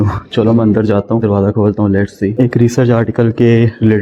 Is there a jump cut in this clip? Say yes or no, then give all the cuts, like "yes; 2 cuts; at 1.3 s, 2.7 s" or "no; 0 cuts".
yes; 2 cuts; at 1.2 s, 2.4 s